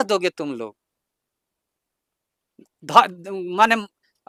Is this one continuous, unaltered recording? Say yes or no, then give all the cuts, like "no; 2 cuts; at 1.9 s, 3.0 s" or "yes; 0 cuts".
yes; 0 cuts